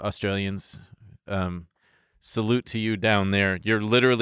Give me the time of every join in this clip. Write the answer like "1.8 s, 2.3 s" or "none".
none